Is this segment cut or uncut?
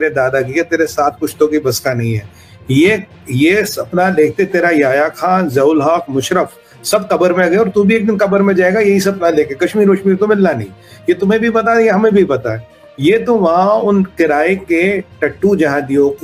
uncut